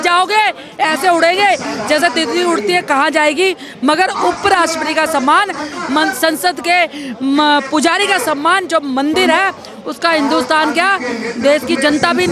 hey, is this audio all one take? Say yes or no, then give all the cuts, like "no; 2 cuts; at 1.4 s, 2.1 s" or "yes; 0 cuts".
yes; 0 cuts